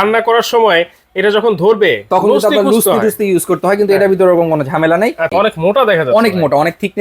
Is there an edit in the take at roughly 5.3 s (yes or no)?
yes